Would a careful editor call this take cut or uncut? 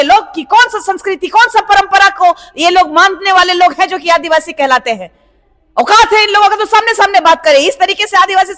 uncut